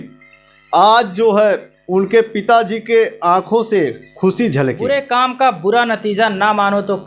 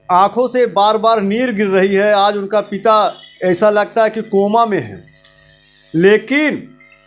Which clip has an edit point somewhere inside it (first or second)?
first